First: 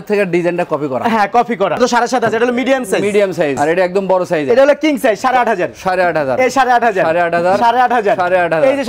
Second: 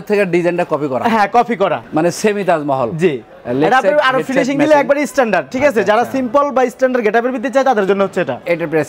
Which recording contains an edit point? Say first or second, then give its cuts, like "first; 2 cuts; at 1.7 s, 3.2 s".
first; 2 cuts; at 1.8 s, 3.6 s